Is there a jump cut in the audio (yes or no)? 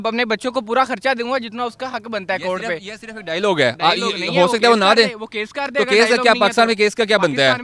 no